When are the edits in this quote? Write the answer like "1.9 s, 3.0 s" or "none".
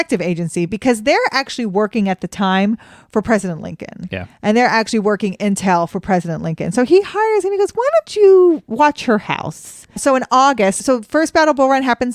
none